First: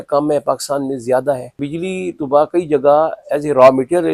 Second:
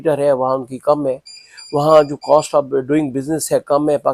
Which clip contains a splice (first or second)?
first